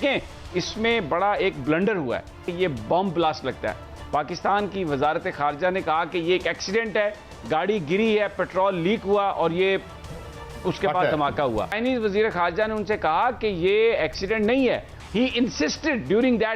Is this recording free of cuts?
no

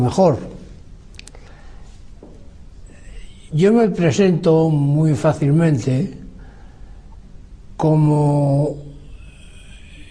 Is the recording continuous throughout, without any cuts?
no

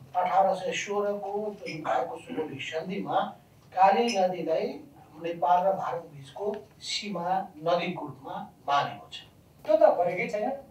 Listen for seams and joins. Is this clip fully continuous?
no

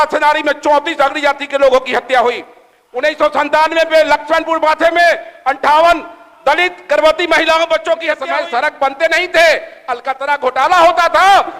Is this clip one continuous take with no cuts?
no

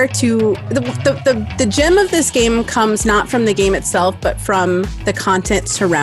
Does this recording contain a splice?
no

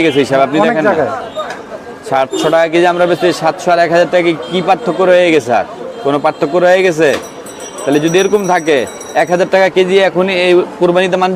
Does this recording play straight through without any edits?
yes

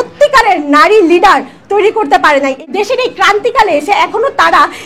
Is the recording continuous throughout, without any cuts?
no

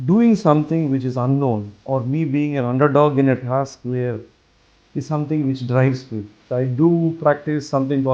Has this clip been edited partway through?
yes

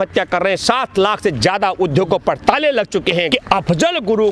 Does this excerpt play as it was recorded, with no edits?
no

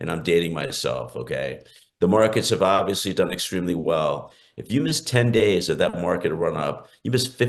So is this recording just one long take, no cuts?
yes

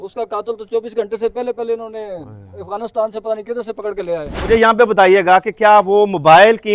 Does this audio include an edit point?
yes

